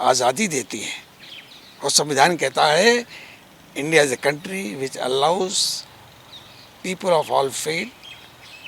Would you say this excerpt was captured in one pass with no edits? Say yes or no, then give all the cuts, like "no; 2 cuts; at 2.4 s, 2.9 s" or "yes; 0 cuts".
yes; 0 cuts